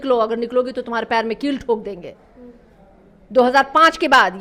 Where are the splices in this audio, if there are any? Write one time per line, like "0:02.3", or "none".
none